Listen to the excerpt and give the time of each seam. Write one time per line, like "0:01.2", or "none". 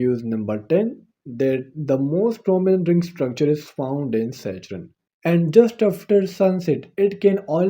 0:05.1